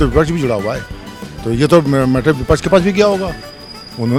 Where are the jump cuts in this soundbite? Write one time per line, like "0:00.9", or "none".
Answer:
none